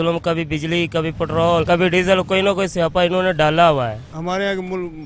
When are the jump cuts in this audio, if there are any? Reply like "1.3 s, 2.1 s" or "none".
1.6 s, 4.1 s